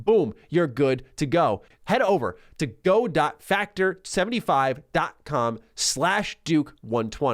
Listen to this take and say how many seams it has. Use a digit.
1